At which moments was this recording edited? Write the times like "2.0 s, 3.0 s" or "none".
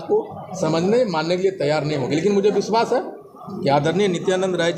none